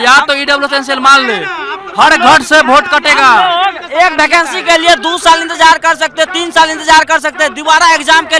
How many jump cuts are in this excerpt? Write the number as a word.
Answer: zero